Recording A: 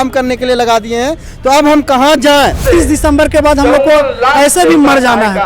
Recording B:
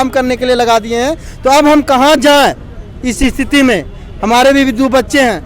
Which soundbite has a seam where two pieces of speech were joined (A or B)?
A